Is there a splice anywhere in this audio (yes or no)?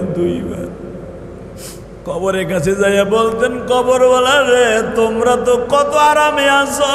yes